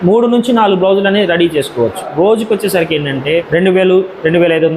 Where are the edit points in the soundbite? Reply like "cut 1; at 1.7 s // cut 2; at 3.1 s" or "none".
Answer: cut 1; at 2.1 s // cut 2; at 3.2 s